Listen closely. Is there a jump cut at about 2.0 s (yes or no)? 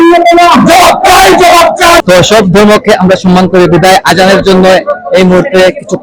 yes